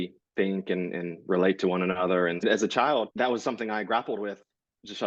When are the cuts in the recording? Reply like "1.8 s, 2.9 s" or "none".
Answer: 2.4 s, 3.1 s